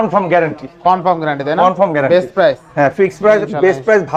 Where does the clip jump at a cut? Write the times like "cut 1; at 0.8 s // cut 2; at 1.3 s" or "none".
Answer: none